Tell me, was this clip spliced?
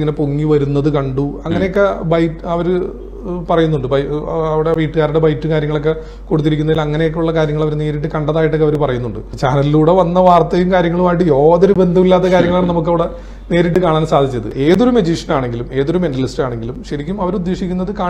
yes; 1 cut; at 14.5 s

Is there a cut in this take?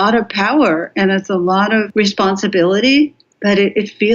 yes; 2 cuts; at 1.9 s, 3.3 s

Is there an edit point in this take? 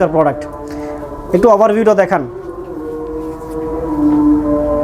no; 0 cuts

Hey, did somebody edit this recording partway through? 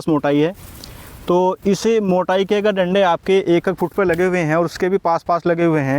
no; 0 cuts

